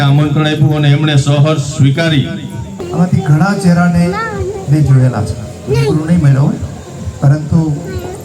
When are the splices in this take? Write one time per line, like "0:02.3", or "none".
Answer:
0:02.8